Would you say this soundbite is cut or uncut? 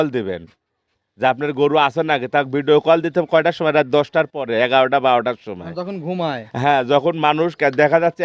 uncut